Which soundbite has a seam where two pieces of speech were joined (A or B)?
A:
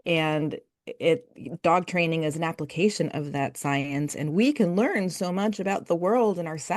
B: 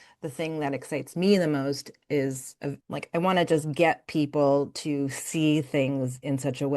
B